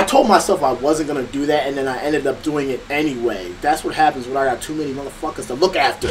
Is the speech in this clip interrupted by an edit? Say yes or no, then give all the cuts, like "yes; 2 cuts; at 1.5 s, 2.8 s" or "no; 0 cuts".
no; 0 cuts